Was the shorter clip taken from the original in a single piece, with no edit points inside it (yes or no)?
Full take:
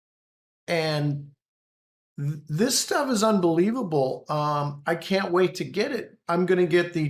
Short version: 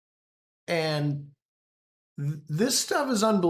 yes